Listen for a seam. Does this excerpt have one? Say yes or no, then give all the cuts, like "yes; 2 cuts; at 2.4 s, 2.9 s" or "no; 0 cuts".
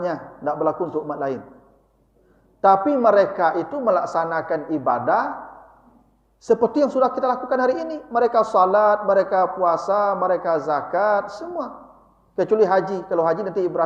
no; 0 cuts